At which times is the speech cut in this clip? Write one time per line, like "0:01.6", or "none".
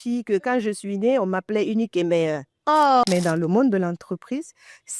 0:03.0